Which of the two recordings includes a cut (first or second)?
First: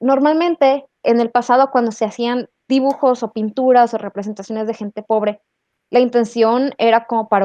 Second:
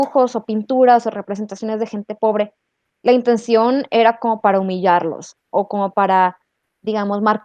first